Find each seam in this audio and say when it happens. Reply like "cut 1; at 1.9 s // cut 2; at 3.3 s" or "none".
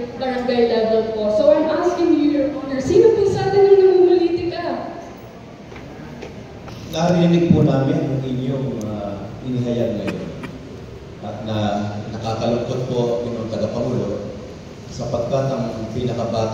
cut 1; at 6.7 s